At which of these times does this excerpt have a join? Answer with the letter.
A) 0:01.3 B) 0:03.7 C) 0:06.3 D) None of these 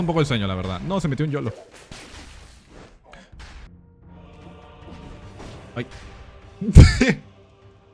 B